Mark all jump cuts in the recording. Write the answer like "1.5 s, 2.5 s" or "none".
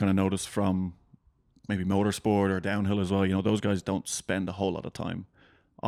none

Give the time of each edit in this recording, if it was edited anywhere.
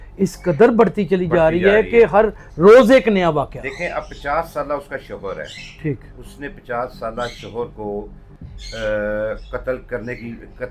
none

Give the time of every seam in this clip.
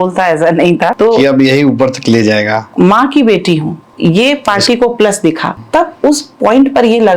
0.9 s, 2.6 s, 3.8 s, 5.5 s

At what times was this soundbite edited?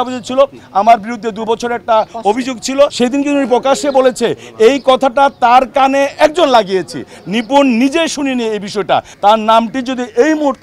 2.9 s, 9.1 s

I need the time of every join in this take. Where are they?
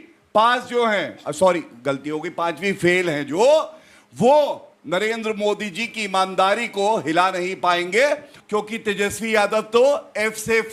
8.3 s

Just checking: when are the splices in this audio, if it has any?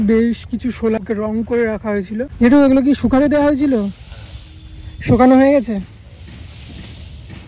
1.0 s, 2.3 s

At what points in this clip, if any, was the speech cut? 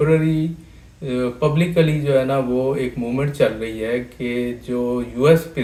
none

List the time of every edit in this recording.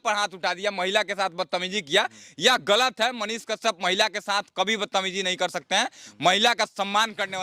none

